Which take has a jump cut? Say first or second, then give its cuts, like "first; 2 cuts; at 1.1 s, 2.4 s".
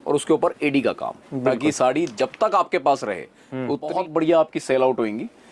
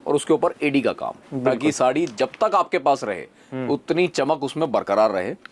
first; 1 cut; at 3.9 s